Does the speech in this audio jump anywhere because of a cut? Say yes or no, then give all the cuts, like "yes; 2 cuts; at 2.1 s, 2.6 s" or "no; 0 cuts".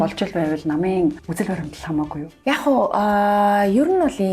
yes; 2 cuts; at 1.2 s, 2.3 s